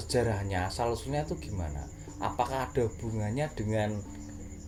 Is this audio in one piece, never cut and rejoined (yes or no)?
yes